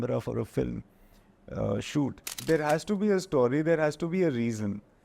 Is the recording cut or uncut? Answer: cut